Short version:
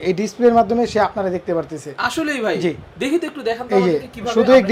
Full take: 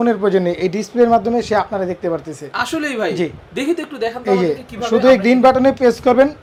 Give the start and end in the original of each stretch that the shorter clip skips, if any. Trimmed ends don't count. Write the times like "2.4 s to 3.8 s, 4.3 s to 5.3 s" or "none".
none